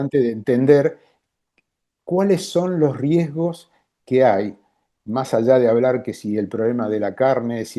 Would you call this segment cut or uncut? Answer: uncut